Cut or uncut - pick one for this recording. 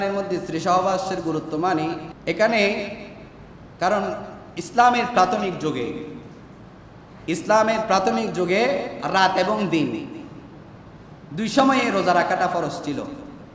cut